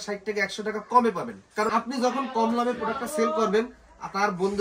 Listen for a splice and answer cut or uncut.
cut